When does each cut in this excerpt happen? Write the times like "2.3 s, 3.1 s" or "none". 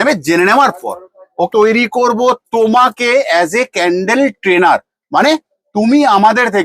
1.5 s